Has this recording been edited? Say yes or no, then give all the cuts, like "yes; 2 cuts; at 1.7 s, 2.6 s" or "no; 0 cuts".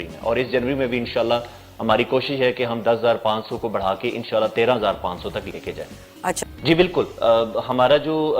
yes; 1 cut; at 6.4 s